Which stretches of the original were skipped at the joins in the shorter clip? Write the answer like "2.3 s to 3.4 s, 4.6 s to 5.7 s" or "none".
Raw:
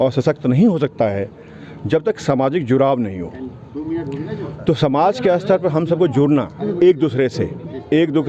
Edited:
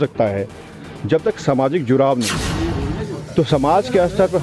3.2 s to 3.7 s